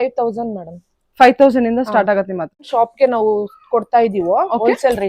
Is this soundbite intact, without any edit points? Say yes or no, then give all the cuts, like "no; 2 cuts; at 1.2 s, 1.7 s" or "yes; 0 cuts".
no; 1 cut; at 2.7 s